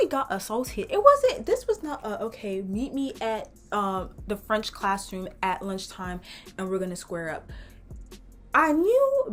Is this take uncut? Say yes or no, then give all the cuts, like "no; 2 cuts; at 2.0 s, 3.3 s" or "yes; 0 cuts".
yes; 0 cuts